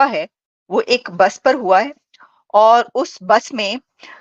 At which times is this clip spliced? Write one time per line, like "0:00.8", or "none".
none